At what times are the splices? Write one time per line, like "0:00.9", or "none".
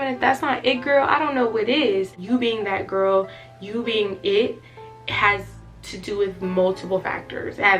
0:02.2